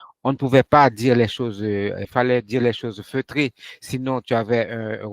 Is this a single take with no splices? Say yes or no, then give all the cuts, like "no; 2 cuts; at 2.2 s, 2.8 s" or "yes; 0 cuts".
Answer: no; 1 cut; at 2.0 s